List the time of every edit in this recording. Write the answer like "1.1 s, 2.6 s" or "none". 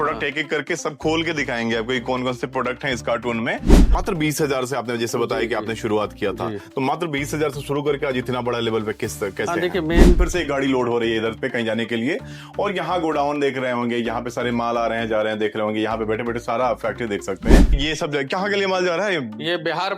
3.8 s, 10.2 s, 17.7 s